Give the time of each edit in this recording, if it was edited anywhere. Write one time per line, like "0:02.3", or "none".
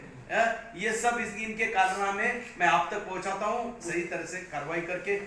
0:03.8